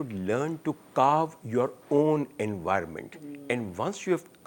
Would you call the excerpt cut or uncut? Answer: uncut